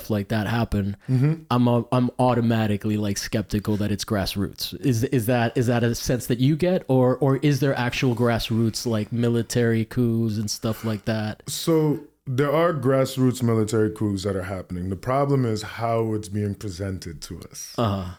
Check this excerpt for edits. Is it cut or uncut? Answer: uncut